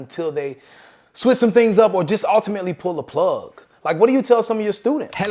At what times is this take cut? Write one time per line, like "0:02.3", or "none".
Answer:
none